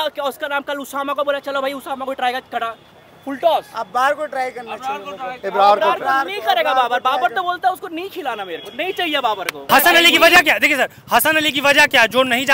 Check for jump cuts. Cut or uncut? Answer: cut